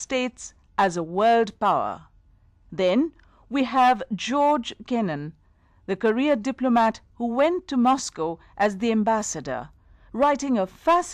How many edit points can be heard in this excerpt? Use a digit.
1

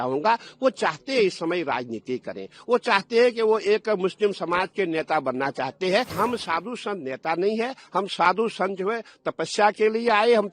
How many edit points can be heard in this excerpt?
1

